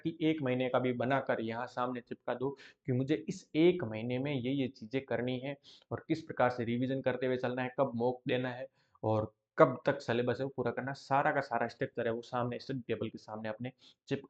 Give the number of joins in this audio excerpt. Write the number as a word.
zero